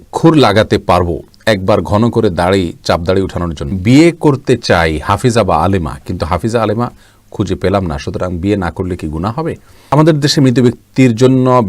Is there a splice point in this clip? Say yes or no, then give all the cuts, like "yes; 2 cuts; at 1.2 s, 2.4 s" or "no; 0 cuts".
yes; 2 cuts; at 3.7 s, 9.9 s